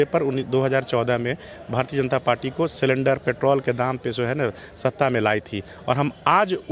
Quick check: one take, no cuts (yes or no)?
yes